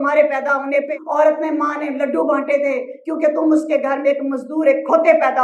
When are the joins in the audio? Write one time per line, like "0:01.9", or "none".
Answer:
0:01.0